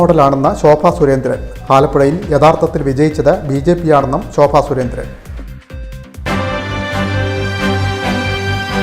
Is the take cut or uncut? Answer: cut